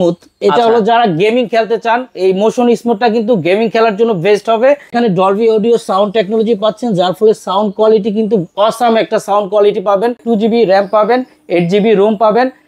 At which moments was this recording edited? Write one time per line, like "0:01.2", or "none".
0:04.9
0:10.2